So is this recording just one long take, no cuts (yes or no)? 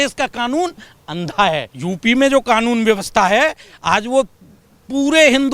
no